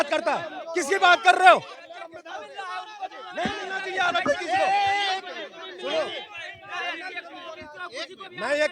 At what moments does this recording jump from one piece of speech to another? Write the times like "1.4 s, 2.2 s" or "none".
none